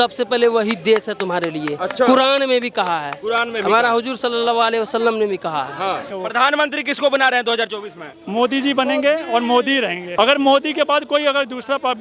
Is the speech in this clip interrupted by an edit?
yes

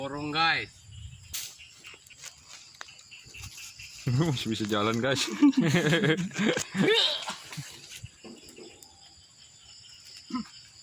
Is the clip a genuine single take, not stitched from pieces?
no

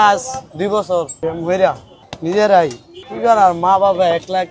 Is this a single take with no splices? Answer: no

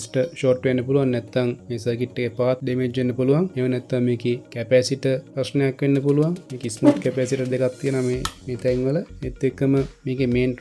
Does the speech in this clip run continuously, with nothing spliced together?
no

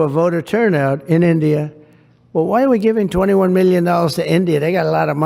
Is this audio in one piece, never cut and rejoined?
yes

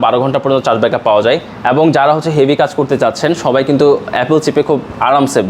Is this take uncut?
yes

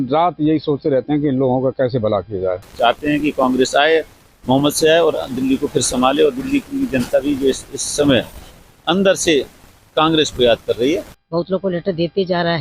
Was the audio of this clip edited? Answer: yes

